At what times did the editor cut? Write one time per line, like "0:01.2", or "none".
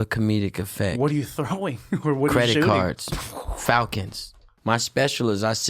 0:04.5